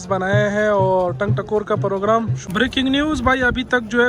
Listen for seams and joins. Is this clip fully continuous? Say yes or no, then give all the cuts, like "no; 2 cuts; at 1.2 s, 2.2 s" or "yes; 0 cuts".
no; 1 cut; at 2.4 s